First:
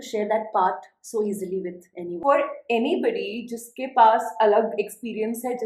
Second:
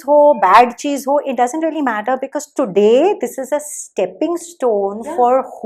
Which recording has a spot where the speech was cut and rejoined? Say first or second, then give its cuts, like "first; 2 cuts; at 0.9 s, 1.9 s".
first; 1 cut; at 2.1 s